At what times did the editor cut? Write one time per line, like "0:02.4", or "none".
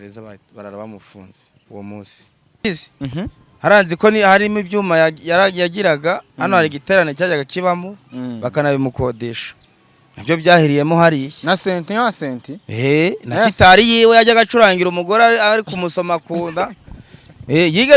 0:02.6